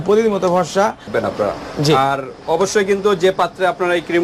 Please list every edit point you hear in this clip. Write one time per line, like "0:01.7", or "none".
0:01.1